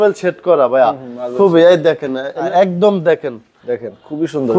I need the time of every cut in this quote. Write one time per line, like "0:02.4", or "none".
0:02.5

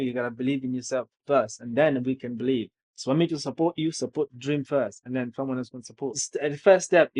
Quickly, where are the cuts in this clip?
0:06.2

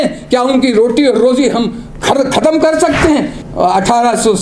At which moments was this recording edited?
0:03.4

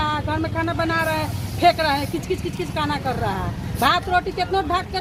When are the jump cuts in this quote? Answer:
none

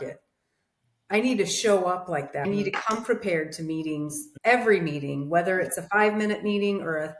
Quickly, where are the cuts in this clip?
none

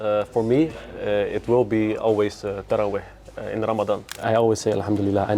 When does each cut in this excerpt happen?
0:04.1

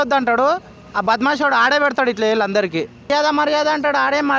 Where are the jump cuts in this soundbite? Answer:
0:03.1

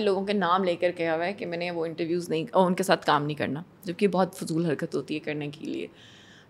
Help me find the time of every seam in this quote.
none

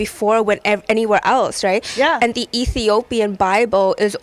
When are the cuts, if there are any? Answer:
none

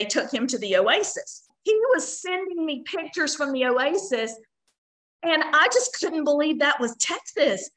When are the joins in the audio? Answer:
0:01.5

